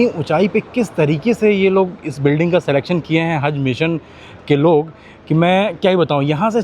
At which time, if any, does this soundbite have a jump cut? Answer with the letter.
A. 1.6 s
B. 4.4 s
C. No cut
C